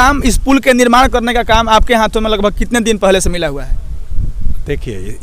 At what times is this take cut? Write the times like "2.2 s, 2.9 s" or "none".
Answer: none